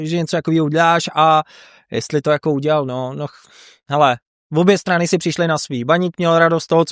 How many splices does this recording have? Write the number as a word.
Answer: zero